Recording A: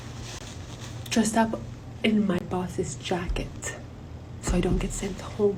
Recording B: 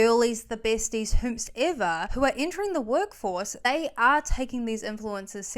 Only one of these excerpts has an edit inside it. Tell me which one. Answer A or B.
B